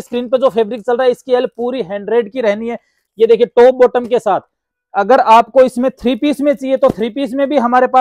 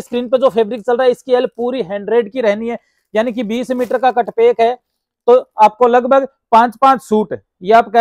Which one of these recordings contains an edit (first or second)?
first